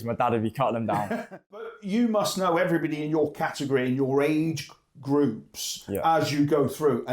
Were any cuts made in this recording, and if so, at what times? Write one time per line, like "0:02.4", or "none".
0:01.6